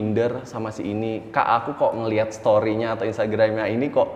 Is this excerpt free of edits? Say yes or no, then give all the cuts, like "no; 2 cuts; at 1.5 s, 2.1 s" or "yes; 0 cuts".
yes; 0 cuts